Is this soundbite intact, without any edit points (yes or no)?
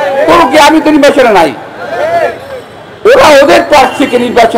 yes